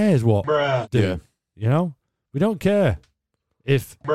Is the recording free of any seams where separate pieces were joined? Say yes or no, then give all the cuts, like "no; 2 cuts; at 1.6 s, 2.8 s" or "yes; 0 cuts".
yes; 0 cuts